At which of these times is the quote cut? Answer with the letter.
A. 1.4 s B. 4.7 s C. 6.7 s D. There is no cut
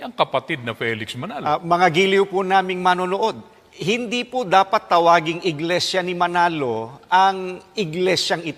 A